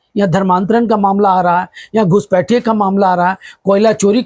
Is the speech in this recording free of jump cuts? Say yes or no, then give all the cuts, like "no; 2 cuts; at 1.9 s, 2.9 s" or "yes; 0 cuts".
yes; 0 cuts